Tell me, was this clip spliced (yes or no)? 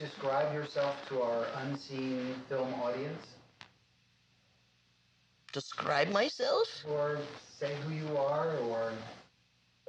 no